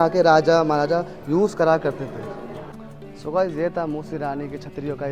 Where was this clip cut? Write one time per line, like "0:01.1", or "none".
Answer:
none